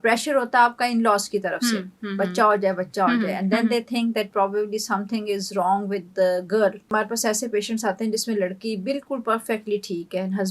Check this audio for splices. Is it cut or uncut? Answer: cut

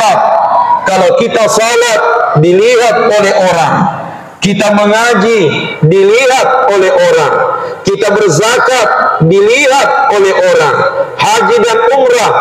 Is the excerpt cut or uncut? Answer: uncut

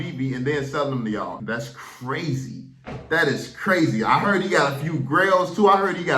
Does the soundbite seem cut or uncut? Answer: cut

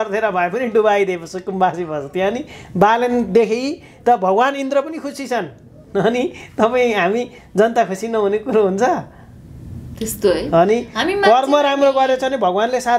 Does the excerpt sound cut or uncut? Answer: uncut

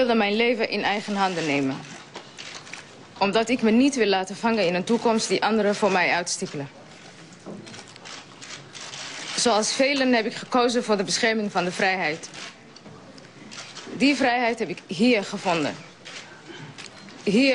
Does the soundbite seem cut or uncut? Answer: cut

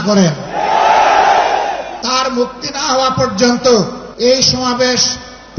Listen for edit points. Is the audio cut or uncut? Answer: cut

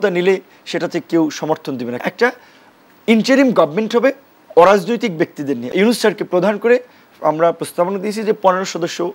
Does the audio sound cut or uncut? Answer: cut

